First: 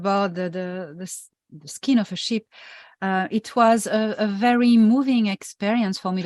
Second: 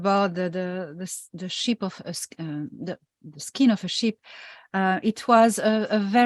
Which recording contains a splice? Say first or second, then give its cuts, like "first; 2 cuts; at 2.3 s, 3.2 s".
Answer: first; 1 cut; at 1.3 s